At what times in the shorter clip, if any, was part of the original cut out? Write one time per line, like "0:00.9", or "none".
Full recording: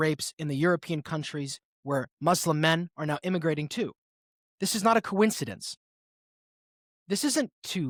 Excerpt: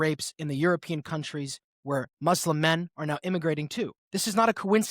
0:04.0